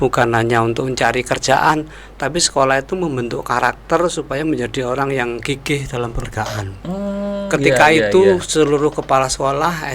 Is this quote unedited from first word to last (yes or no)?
no